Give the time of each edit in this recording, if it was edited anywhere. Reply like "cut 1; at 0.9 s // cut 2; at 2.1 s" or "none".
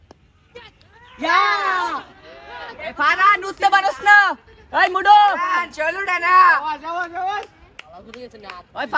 none